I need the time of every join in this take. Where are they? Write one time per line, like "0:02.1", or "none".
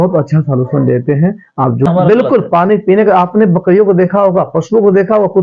0:01.9